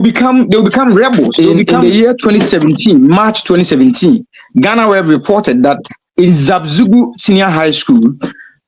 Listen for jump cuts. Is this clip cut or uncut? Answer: cut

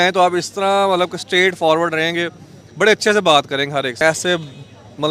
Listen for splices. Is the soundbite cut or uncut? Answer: cut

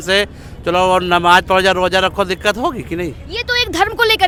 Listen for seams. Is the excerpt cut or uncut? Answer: uncut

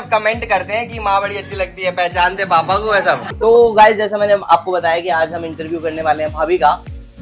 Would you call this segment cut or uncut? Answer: cut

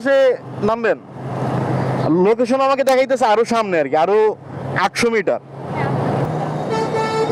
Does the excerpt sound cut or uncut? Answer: uncut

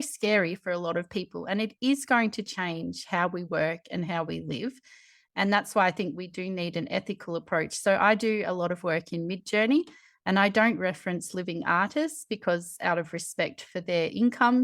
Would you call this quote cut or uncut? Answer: uncut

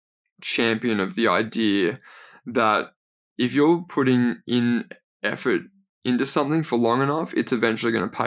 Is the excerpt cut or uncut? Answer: uncut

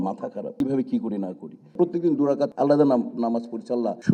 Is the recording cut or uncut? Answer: cut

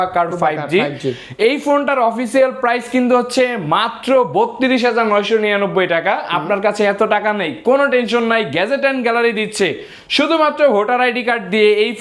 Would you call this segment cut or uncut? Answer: uncut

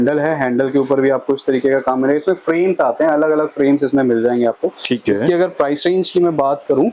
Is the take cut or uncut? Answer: uncut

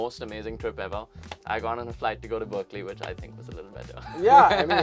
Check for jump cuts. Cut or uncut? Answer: uncut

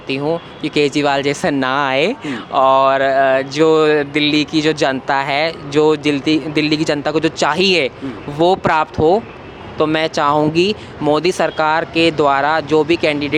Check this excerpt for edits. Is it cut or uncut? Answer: uncut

